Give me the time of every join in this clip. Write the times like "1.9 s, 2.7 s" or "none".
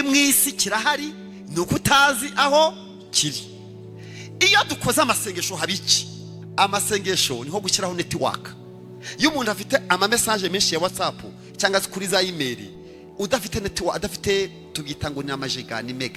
none